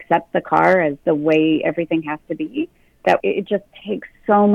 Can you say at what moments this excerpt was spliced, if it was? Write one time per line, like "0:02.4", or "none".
0:01.0
0:03.2